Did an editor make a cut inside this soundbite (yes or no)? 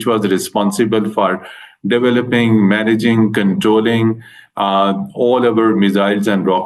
no